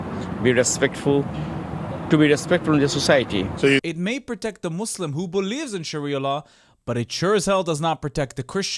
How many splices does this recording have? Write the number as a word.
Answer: zero